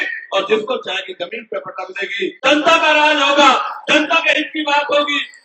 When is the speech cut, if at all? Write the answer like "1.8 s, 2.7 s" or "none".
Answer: 2.4 s